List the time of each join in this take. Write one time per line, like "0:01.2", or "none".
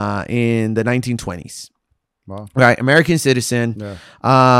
none